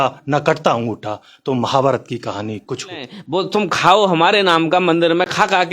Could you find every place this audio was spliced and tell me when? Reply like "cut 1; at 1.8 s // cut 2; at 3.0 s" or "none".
cut 1; at 3.2 s